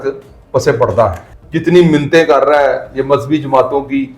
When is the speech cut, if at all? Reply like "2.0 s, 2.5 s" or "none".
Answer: 1.3 s